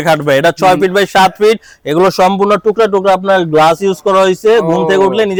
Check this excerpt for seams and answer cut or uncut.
uncut